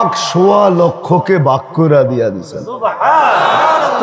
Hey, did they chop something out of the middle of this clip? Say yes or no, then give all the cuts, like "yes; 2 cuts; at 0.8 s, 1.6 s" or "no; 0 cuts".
no; 0 cuts